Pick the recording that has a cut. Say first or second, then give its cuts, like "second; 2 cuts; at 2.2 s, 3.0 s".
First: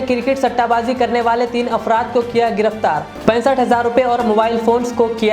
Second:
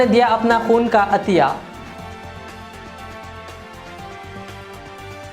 second; 2 cuts; at 1.7 s, 4.4 s